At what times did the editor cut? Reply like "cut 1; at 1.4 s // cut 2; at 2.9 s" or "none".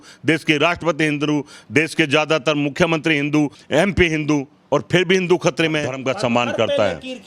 cut 1; at 3.6 s // cut 2; at 6.0 s